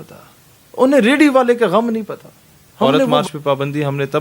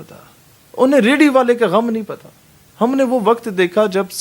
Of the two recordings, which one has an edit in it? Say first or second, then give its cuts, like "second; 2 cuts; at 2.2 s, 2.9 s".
first; 1 cut; at 3.1 s